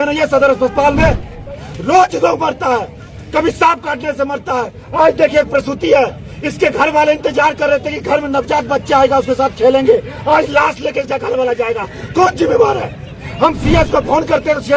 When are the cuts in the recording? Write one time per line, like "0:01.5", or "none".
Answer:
none

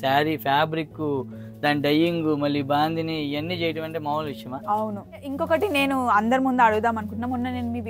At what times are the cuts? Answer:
0:05.3

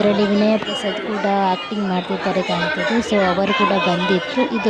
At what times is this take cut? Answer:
none

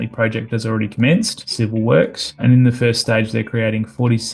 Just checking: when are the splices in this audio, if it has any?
0:01.4
0:02.2

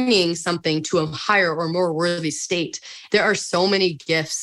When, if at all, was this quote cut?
0:02.9

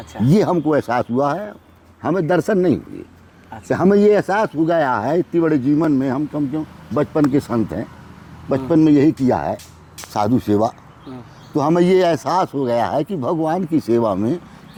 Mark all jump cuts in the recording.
none

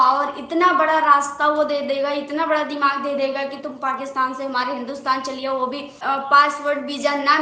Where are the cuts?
0:06.0

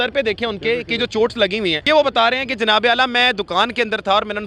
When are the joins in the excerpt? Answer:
0:01.8

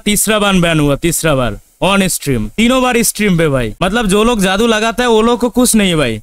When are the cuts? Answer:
0:02.5

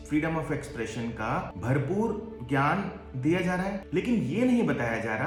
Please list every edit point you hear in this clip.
none

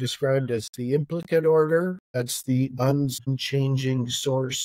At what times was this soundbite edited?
0:02.0
0:03.4

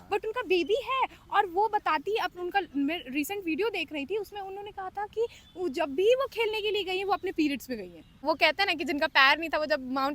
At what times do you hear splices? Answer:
0:08.2

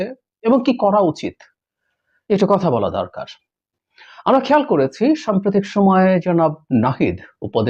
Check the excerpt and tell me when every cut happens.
none

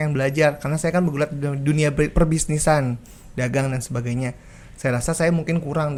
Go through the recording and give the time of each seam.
none

